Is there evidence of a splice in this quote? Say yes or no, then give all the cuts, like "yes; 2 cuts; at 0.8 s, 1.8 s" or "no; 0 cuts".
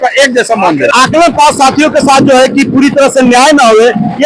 yes; 1 cut; at 0.9 s